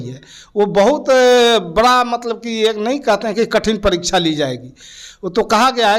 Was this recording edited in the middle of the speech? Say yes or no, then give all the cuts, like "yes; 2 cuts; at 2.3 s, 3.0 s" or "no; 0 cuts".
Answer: no; 0 cuts